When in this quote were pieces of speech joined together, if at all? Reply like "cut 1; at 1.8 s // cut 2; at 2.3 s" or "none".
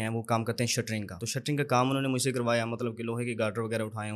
cut 1; at 1.2 s